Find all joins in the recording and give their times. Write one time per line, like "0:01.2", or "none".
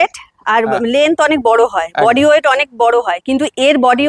none